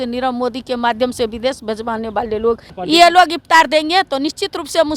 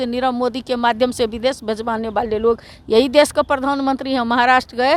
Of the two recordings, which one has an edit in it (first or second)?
first